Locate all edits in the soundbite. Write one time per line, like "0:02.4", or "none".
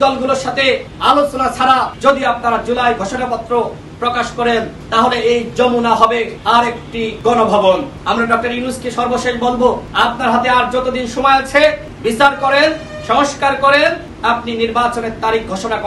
0:00.9
0:01.9
0:04.8
0:06.8
0:07.9
0:09.9
0:11.9
0:14.1